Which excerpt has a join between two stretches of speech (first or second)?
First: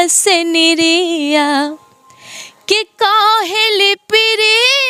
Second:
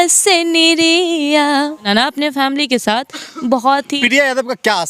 second